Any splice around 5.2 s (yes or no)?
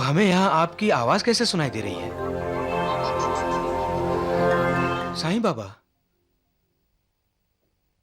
yes